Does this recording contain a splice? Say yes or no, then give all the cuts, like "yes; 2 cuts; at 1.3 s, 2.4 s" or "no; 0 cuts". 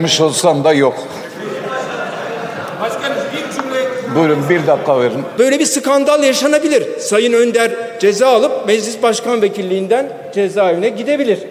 yes; 1 cut; at 5.2 s